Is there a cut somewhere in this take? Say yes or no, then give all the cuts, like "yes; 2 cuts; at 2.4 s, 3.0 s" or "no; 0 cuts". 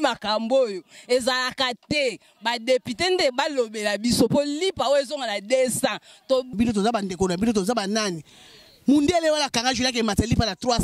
yes; 1 cut; at 6.5 s